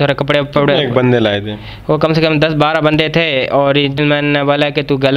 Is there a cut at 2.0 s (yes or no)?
no